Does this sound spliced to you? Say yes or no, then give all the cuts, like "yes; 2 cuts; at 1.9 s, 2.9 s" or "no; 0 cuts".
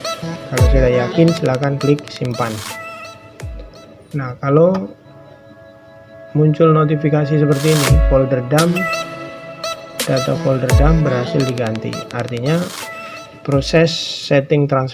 no; 0 cuts